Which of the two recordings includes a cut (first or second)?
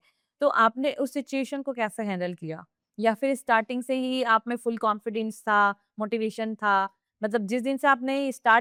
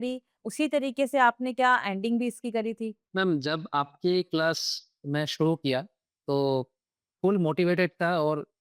second